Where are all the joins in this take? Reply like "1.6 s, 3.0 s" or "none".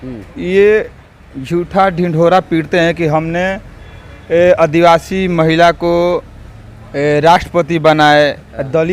none